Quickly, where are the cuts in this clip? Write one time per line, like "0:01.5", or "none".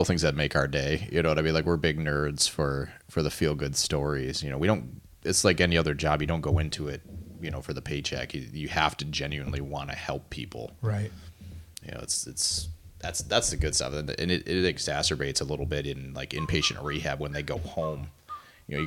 none